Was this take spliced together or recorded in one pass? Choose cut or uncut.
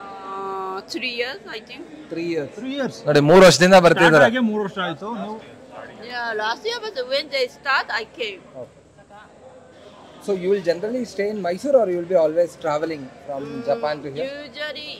uncut